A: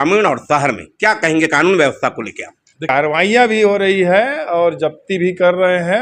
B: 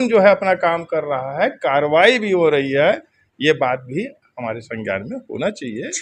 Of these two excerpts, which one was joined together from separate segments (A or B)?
A